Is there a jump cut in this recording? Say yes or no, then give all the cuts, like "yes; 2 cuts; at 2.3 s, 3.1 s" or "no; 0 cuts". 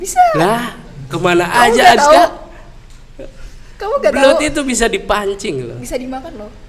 no; 0 cuts